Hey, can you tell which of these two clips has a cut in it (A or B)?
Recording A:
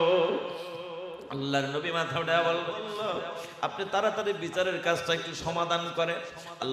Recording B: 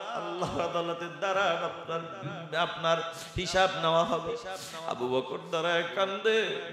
A